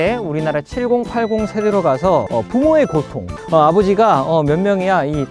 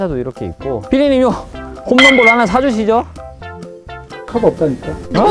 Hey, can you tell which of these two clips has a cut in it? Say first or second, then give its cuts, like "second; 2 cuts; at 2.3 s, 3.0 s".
first; 2 cuts; at 2.3 s, 3.3 s